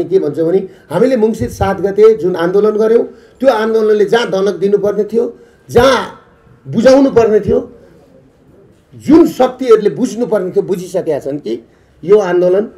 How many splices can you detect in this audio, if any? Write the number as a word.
zero